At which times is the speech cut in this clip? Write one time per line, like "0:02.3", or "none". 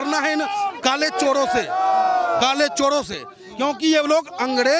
none